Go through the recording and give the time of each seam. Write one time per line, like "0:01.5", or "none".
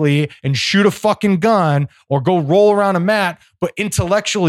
none